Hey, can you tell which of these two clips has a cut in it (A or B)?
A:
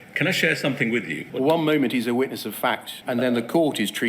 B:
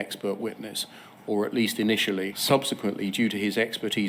A